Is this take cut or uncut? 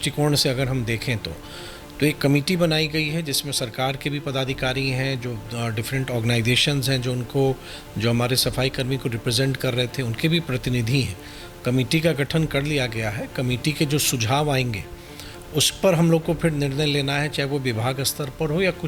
uncut